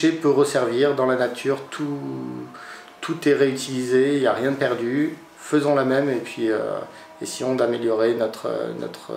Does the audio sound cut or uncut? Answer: uncut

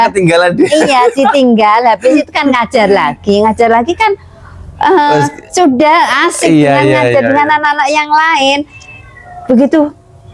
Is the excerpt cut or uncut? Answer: uncut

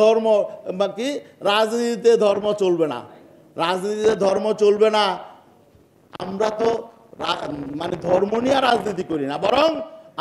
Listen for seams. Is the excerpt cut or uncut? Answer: uncut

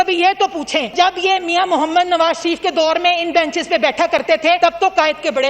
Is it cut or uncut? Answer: cut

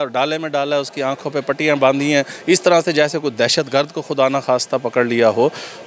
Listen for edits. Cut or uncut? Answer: uncut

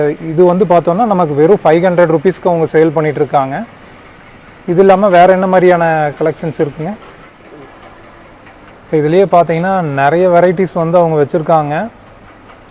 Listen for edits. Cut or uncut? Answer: uncut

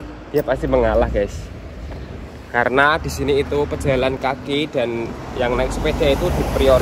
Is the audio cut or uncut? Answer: uncut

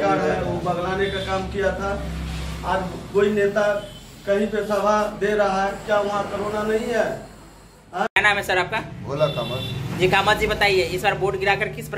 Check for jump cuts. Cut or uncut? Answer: cut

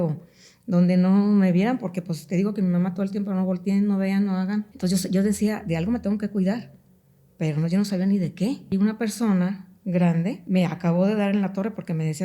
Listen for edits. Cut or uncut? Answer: cut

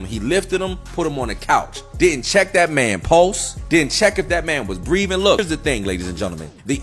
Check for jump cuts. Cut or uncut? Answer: cut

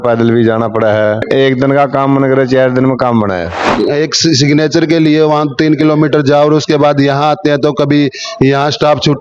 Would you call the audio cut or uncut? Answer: cut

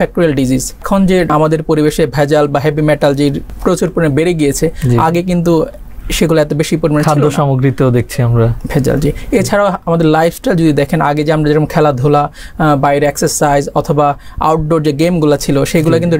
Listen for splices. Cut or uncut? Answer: cut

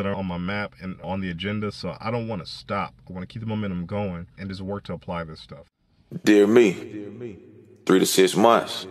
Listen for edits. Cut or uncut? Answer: cut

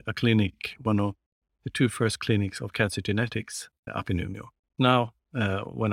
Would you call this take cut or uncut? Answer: cut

